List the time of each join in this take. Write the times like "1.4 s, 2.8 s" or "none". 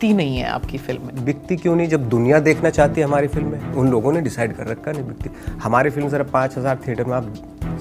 1.0 s, 3.6 s